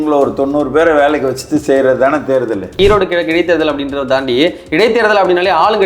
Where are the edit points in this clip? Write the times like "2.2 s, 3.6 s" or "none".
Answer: 2.8 s